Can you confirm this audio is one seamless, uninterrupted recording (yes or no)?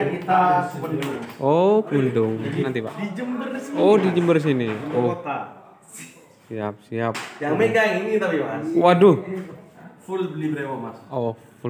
no